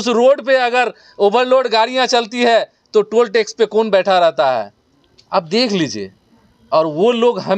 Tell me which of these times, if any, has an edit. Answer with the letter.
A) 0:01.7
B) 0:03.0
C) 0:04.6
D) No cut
D